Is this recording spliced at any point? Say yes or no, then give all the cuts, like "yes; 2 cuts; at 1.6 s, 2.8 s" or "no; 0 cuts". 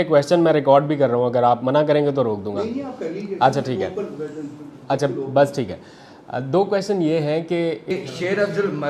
yes; 1 cut; at 7.9 s